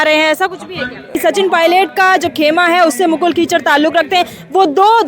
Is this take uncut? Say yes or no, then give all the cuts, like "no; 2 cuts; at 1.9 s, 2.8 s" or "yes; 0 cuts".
no; 1 cut; at 1.2 s